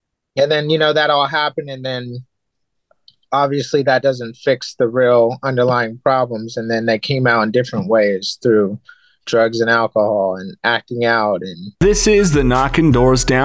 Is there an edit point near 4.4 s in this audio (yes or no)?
no